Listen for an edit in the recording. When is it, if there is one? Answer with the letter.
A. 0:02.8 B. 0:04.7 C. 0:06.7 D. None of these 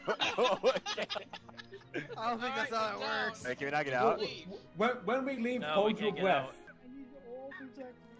C